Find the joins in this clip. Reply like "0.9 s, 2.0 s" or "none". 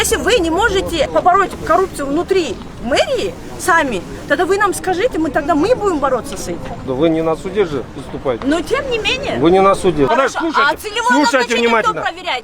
1.1 s, 6.9 s, 10.1 s